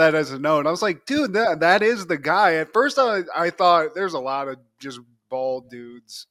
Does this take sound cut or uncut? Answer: uncut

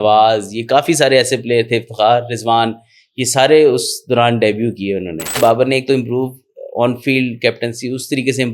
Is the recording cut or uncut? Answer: cut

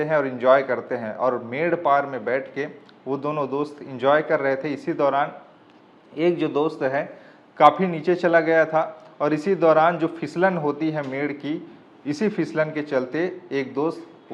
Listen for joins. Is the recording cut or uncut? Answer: uncut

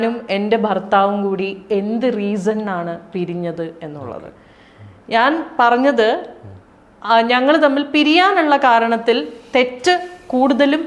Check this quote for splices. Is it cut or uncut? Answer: uncut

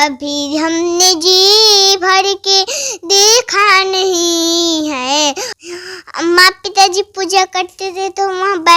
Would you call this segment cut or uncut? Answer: cut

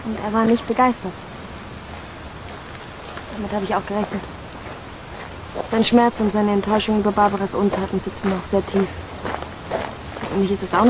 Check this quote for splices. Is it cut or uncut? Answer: cut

